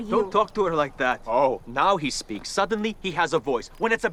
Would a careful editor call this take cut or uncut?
uncut